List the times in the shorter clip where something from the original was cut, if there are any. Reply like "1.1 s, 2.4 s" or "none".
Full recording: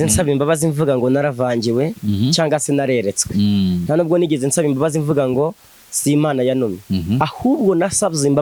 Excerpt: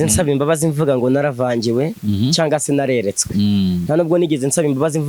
none